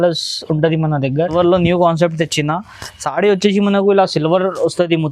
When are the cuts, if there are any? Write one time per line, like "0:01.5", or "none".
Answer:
0:01.3